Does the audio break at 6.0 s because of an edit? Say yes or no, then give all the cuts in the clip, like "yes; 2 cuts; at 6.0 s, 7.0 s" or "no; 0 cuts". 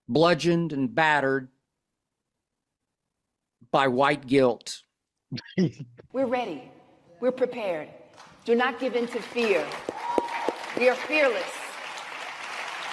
yes; 1 cut; at 6.0 s